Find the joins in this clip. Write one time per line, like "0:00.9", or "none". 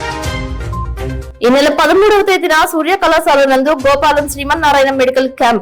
0:01.2